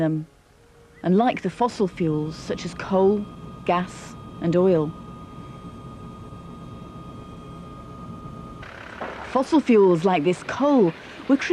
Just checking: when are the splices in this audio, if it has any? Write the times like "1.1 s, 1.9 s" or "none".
1.6 s